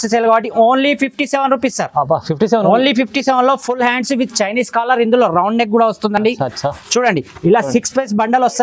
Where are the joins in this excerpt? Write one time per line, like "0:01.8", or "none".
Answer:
none